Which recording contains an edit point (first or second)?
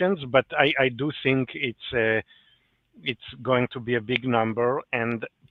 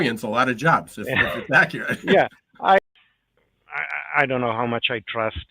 second